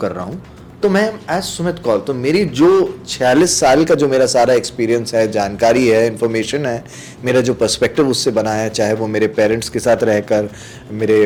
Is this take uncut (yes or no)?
yes